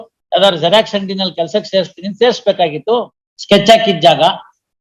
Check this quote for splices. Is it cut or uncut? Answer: cut